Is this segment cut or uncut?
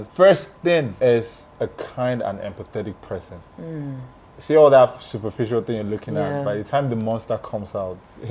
cut